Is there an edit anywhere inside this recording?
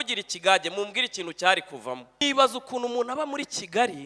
yes; 1 cut; at 2.2 s

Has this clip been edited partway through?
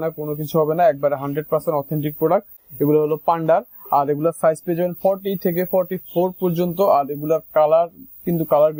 no; 0 cuts

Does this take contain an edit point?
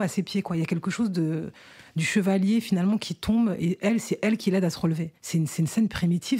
yes; 1 cut; at 5.1 s

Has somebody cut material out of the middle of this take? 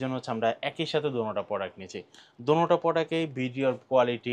no; 0 cuts

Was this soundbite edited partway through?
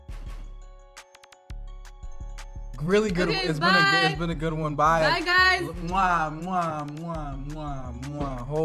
no; 0 cuts

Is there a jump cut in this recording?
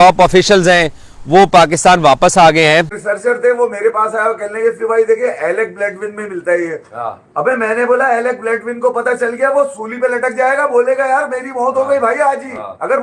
yes; 1 cut; at 3.0 s

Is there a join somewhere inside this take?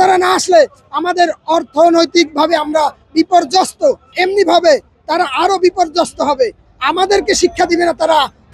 yes; 1 cut; at 4.1 s

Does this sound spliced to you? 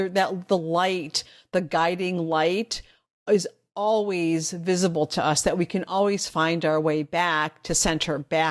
no; 0 cuts

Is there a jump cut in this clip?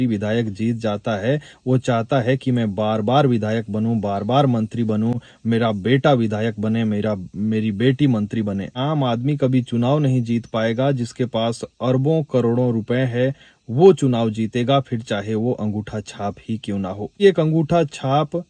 yes; 2 cuts; at 8.8 s, 17.2 s

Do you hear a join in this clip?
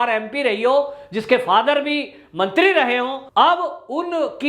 yes; 1 cut; at 3.2 s

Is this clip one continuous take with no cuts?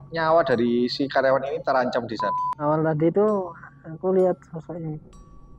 no; 1 cut; at 2.2 s

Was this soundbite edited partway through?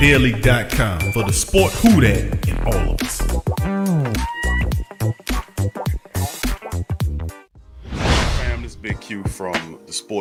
no; 0 cuts

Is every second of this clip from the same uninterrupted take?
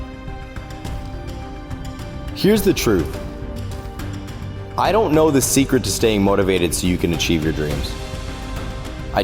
yes; 0 cuts

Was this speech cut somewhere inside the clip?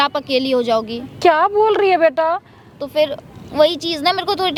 no; 0 cuts

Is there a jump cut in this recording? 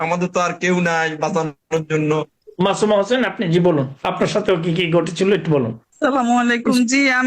no; 0 cuts

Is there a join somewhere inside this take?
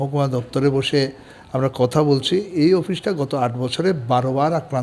no; 0 cuts

